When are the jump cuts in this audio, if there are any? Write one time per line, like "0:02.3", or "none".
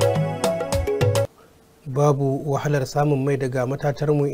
0:01.5